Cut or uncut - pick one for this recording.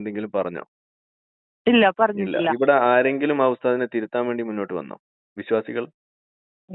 cut